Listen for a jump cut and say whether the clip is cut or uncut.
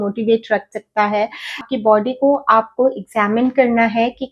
cut